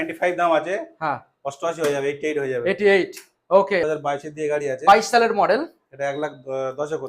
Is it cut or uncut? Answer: cut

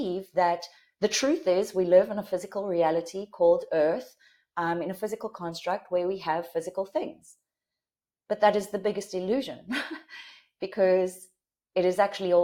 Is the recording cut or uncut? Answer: uncut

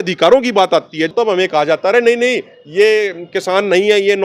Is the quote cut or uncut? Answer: cut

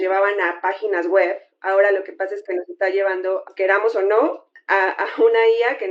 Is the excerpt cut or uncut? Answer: uncut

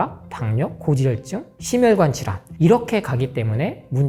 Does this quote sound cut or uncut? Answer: uncut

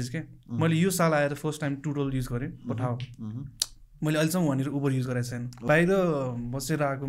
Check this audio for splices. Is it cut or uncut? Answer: cut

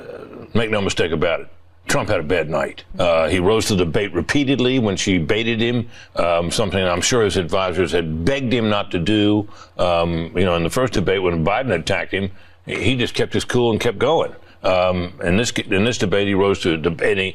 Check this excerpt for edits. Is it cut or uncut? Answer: cut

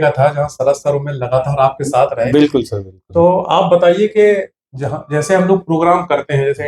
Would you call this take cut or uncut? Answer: uncut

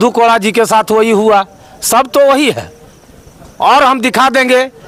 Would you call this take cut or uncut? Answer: uncut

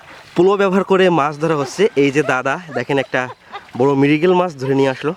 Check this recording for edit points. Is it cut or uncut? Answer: uncut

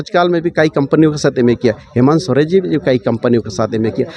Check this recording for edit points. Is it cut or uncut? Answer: uncut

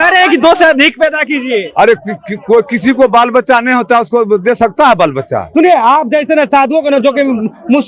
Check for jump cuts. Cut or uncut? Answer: cut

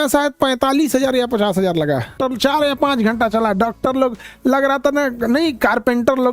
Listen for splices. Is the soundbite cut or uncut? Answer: cut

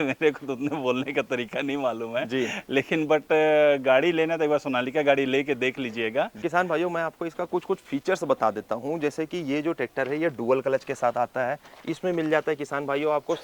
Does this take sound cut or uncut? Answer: uncut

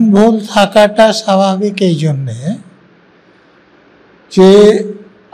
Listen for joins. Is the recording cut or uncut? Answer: uncut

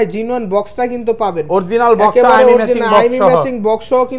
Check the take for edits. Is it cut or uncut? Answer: uncut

